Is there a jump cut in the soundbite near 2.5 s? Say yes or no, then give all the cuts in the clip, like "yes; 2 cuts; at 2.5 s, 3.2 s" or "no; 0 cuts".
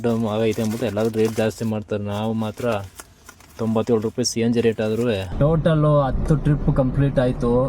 no; 1 cut; at 5.3 s